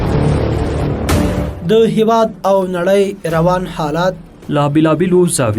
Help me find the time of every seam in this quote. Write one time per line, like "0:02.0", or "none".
0:01.5